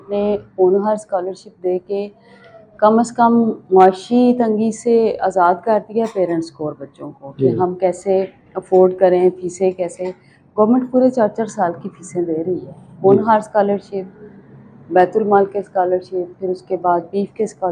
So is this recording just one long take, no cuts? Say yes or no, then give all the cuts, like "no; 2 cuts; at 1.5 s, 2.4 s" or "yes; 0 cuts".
yes; 0 cuts